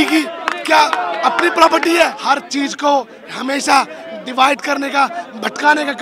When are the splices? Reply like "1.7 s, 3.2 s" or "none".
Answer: 2.2 s